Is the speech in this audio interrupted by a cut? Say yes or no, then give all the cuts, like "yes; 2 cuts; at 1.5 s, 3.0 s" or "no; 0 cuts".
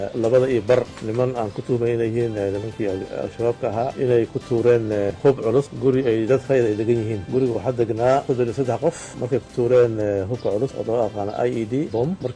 yes; 3 cuts; at 0.9 s, 5.1 s, 9.1 s